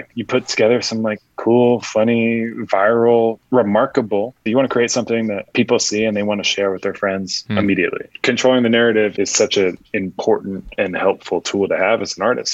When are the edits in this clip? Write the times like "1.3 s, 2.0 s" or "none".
4.4 s, 5.5 s, 7.4 s, 8.1 s, 9.1 s, 10.6 s

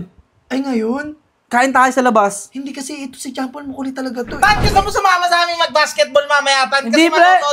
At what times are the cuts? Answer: none

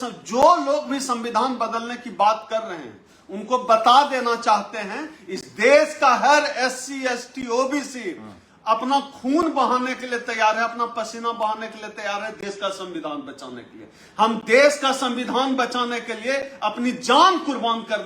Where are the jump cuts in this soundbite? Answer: none

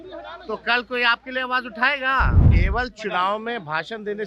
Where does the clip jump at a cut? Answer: 2.5 s

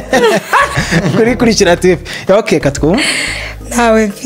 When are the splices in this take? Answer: none

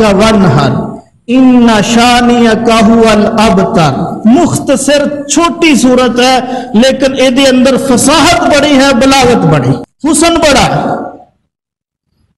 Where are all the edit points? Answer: 9.9 s

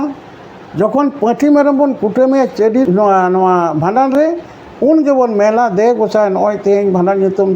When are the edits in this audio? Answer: 2.8 s

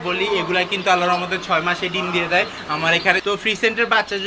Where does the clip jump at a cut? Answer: 3.2 s

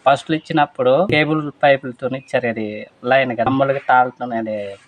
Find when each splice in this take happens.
1.1 s, 3.5 s

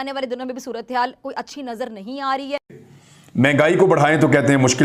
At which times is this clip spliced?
2.8 s

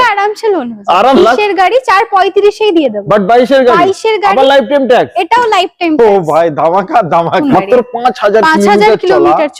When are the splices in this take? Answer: 1.2 s, 7.4 s

